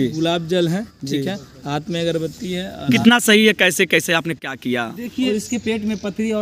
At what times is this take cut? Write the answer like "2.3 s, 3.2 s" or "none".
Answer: 3.0 s, 5.3 s